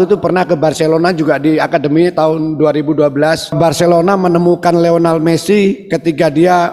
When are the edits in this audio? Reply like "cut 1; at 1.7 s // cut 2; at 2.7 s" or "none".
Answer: cut 1; at 3.6 s